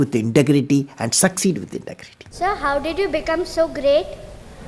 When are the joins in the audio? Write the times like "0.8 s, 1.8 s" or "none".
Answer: 2.3 s